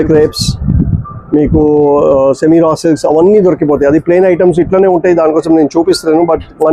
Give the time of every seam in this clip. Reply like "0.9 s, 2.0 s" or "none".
none